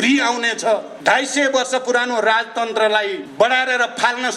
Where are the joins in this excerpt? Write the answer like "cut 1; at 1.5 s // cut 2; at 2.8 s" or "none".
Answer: cut 1; at 0.9 s // cut 2; at 3.2 s